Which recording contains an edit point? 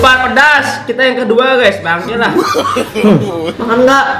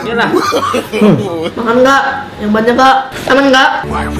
second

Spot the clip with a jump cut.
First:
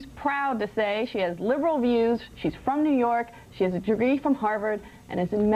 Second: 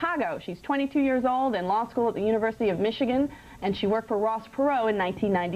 second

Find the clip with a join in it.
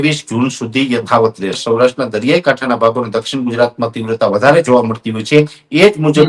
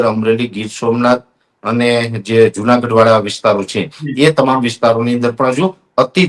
first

